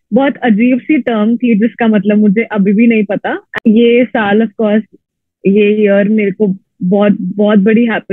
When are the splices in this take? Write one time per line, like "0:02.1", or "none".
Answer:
0:03.4